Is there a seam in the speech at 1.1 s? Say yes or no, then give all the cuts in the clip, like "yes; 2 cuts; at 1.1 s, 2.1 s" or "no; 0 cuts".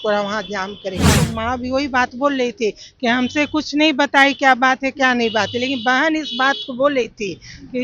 yes; 1 cut; at 1.1 s